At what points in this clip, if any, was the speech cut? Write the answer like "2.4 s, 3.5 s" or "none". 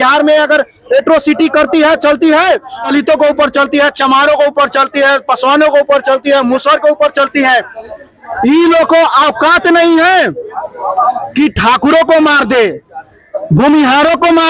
2.8 s